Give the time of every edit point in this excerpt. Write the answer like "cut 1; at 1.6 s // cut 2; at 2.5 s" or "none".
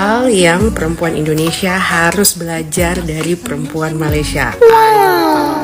none